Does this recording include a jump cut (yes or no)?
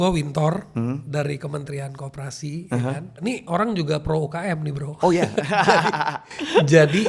yes